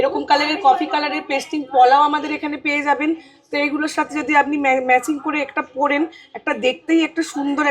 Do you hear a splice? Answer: no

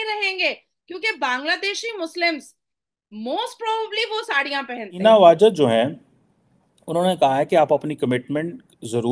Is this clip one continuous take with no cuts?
no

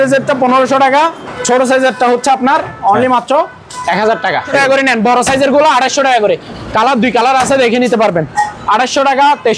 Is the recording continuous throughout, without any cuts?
no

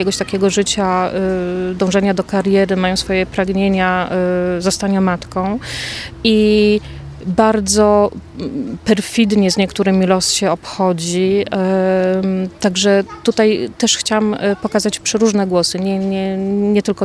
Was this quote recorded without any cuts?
yes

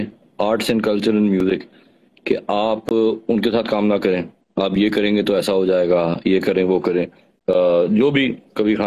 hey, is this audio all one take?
yes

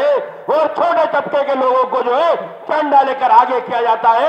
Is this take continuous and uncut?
yes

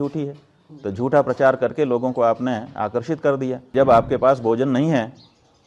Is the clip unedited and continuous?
no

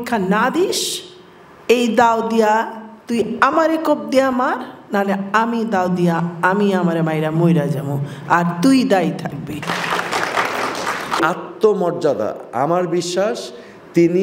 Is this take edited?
yes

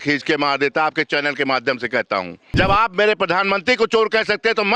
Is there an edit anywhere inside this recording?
yes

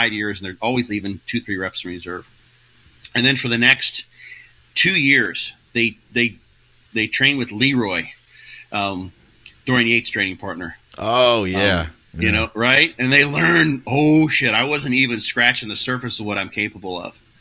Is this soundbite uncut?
yes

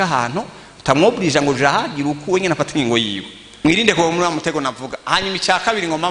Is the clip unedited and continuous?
no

